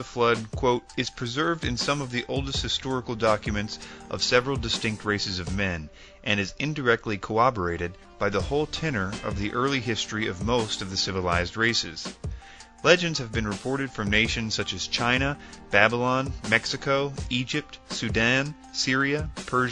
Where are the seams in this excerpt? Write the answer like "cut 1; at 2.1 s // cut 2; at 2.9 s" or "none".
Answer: none